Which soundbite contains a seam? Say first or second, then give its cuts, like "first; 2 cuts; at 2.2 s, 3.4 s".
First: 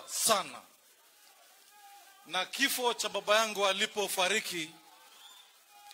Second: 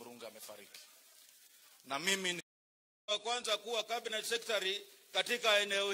second; 2 cuts; at 2.4 s, 3.7 s